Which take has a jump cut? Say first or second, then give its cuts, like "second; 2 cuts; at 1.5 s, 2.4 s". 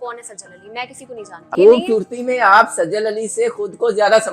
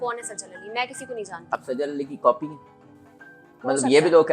first; 1 cut; at 1.5 s